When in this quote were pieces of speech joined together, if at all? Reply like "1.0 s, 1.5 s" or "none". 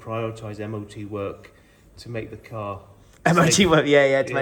none